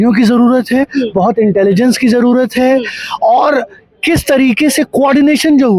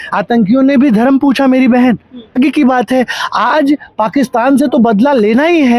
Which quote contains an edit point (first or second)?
second